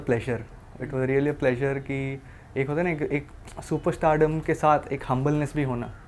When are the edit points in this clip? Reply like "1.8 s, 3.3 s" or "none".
none

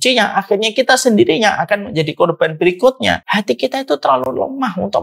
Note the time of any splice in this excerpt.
3.2 s

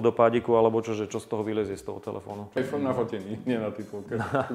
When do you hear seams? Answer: 2.6 s

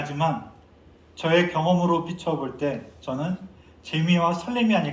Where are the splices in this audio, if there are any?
none

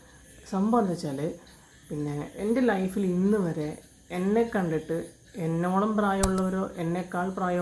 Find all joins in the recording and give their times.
none

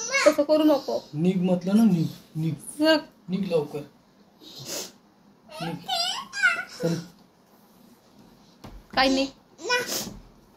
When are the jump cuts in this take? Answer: none

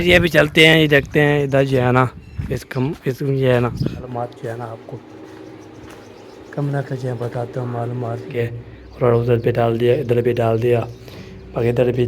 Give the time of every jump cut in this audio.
4.1 s, 8.3 s

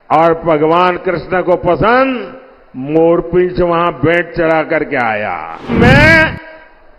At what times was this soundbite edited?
5.7 s

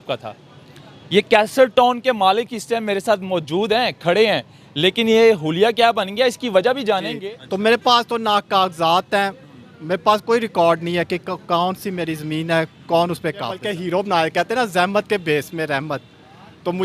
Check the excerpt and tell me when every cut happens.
7.1 s, 13.6 s

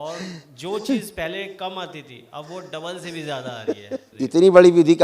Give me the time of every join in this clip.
4.1 s

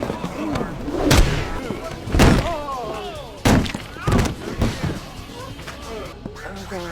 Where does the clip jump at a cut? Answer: 1.3 s

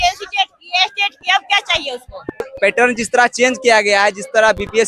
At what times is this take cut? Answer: 2.4 s

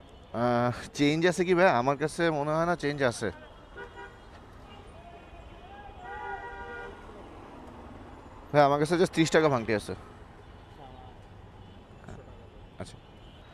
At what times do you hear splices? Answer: none

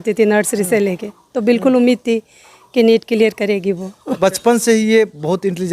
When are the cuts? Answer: 4.2 s

